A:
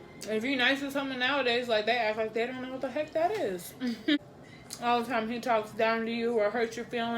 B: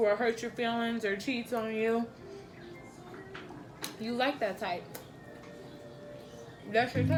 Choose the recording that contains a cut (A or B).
A